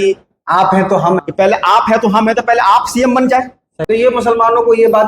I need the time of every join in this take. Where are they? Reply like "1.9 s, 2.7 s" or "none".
1.3 s, 3.8 s

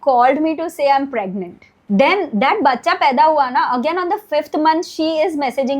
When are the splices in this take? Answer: 1.7 s

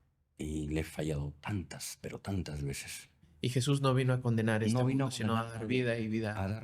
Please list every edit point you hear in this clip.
3.3 s

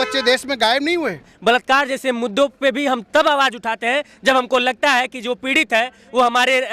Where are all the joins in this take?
1.3 s

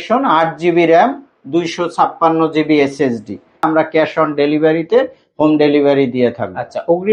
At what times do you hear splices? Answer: 3.6 s

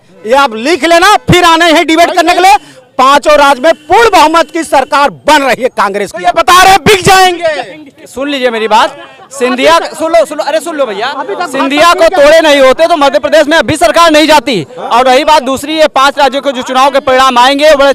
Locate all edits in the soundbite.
none

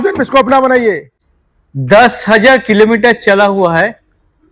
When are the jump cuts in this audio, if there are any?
1.4 s

